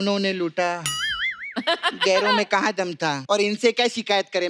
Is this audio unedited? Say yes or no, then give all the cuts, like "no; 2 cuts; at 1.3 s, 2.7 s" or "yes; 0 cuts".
no; 1 cut; at 3.2 s